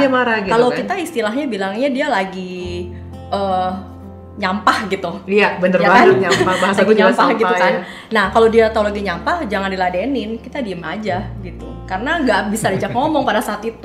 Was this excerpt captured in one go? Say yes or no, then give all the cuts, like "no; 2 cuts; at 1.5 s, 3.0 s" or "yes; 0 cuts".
yes; 0 cuts